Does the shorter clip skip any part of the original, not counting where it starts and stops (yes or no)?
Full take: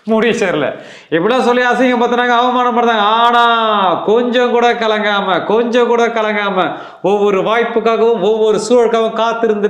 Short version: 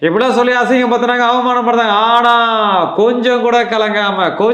no